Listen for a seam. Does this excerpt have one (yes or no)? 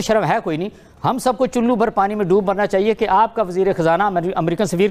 no